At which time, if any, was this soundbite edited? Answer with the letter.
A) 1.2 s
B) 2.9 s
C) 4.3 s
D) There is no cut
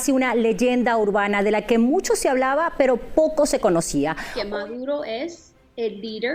C